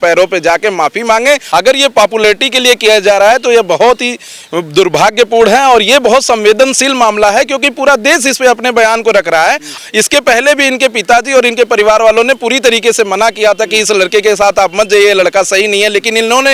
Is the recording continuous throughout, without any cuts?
no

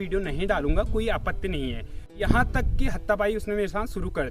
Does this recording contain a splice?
yes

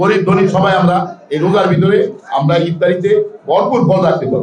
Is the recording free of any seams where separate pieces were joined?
yes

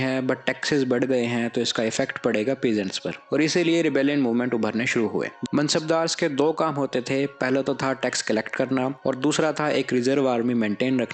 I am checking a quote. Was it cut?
yes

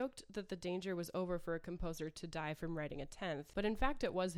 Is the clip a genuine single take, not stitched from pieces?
no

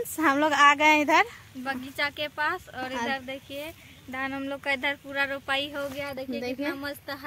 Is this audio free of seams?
yes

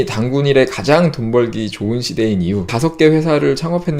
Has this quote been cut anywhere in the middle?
yes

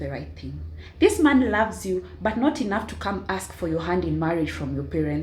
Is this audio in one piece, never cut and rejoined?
yes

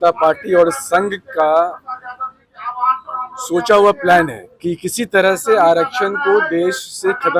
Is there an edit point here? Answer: no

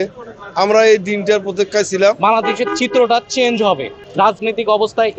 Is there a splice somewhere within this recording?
yes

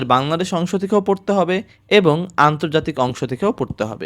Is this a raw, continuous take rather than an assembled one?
yes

